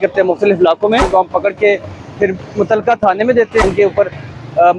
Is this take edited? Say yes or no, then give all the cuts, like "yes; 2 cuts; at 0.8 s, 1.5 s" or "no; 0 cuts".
yes; 2 cuts; at 1.0 s, 3.6 s